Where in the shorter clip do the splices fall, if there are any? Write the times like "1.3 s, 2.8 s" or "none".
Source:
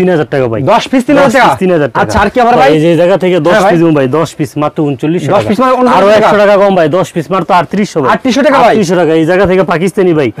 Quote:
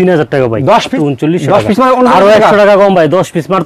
0.9 s